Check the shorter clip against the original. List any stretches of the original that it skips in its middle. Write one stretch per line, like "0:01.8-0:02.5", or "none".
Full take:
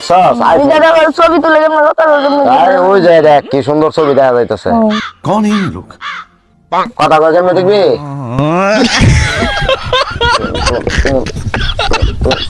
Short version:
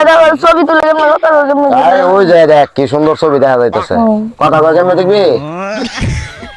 0:05.1-0:06.9
0:08.1-0:08.5